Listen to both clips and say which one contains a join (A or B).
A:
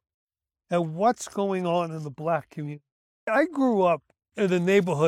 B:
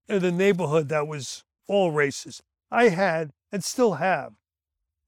A